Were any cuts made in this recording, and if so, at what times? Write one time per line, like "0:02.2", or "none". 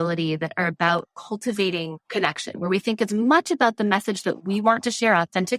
0:02.0